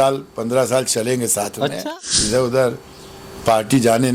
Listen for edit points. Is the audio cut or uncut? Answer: cut